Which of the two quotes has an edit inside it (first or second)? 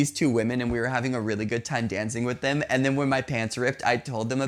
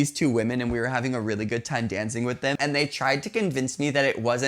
second